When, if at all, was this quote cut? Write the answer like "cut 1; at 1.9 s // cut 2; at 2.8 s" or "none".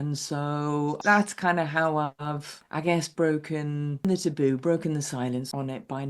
cut 1; at 1.0 s // cut 2; at 4.0 s